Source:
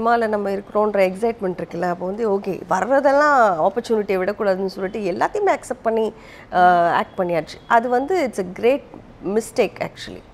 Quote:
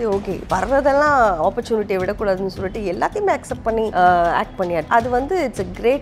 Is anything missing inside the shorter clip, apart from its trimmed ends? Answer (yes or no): yes